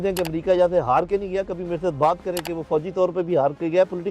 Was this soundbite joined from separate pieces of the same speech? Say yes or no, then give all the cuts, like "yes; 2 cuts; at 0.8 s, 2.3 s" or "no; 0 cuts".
no; 0 cuts